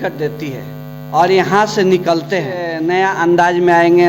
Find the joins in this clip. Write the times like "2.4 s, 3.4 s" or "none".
2.9 s